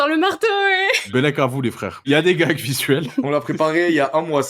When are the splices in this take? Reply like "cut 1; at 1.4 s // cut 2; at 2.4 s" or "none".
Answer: cut 1; at 1.0 s // cut 2; at 2.0 s // cut 3; at 3.2 s